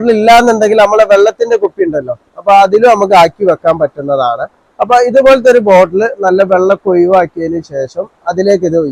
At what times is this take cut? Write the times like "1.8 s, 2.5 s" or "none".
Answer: none